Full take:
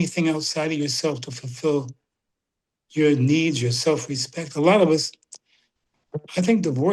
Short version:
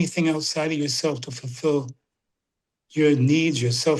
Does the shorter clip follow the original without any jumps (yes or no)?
yes